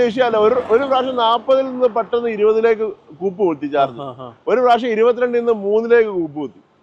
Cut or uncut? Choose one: uncut